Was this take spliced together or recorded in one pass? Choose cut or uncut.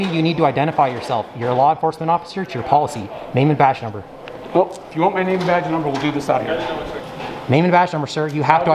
cut